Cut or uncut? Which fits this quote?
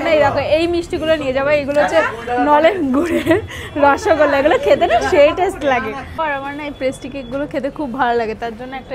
cut